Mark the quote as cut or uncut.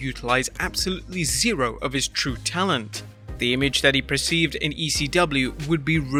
uncut